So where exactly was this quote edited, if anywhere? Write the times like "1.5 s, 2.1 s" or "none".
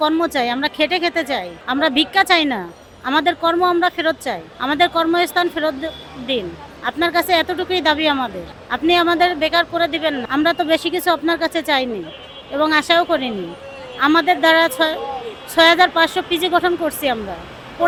none